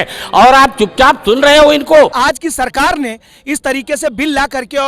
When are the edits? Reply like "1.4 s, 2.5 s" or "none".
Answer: 2.2 s